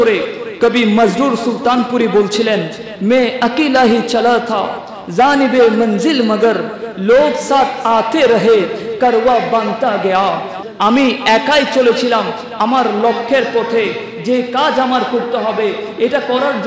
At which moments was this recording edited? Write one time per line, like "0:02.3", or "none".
0:10.5